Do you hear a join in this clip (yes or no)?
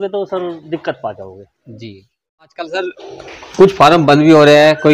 yes